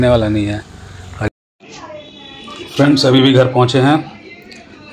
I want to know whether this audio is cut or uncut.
cut